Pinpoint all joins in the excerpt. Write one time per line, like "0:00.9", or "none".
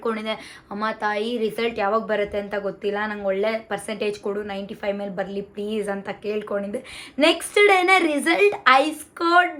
none